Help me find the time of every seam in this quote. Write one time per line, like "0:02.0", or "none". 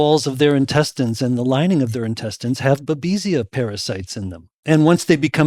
0:04.2